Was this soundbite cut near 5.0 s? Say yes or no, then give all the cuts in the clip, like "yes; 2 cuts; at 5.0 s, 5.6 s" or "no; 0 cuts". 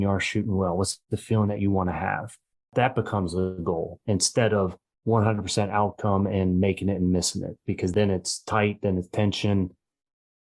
no; 2 cuts; at 2.7 s, 7.9 s